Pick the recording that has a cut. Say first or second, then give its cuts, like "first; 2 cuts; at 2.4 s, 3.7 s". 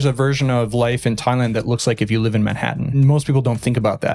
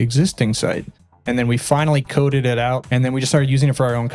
second; 2 cuts; at 1.2 s, 2.9 s